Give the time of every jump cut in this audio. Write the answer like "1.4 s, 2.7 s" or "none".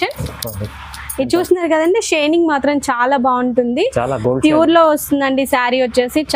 none